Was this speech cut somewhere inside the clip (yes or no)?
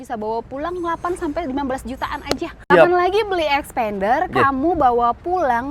yes